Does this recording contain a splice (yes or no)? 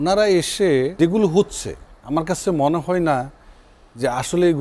yes